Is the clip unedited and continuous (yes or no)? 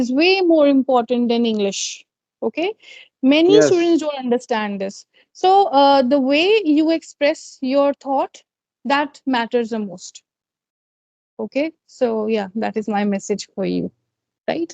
yes